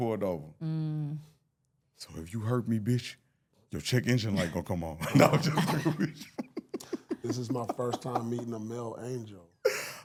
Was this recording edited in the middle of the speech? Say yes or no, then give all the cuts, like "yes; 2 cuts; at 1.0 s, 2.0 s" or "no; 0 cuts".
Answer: no; 0 cuts